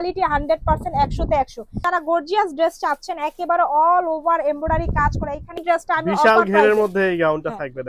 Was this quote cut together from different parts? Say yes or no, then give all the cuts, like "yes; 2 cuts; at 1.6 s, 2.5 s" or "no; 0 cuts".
yes; 2 cuts; at 1.8 s, 5.6 s